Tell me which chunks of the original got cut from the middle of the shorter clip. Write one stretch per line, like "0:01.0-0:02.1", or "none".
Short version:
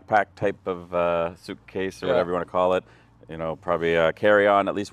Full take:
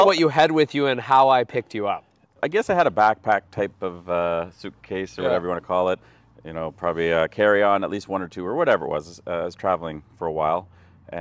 none